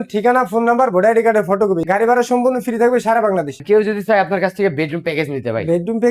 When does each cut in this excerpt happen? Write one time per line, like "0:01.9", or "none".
0:01.8
0:03.6